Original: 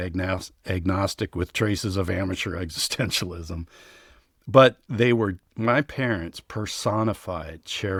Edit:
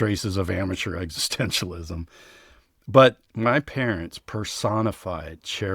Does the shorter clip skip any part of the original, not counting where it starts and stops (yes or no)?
yes